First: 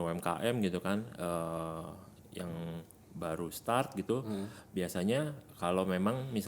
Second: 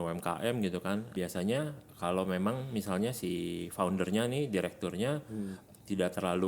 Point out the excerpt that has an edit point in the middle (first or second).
second